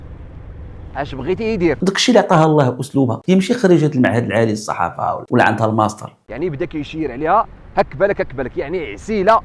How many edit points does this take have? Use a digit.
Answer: 1